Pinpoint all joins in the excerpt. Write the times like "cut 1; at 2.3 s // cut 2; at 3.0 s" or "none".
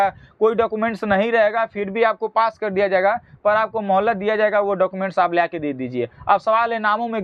none